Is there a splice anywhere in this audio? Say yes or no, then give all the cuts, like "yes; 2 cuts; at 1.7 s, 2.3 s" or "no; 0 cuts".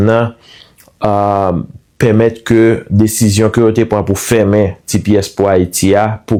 no; 0 cuts